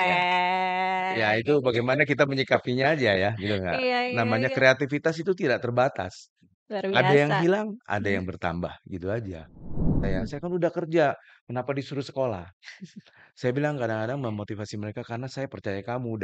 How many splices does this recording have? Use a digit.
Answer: 1